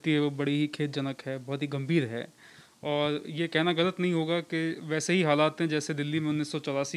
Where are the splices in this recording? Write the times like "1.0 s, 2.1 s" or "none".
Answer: none